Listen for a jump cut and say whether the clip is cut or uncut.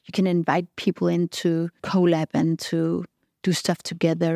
cut